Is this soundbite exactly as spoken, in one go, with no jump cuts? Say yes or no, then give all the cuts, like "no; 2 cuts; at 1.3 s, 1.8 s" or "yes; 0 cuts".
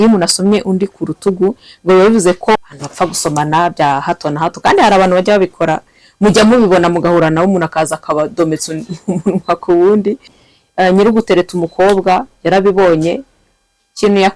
no; 2 cuts; at 2.7 s, 10.4 s